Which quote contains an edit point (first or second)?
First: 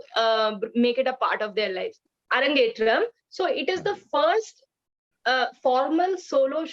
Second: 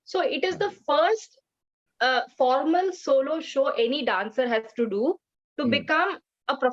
first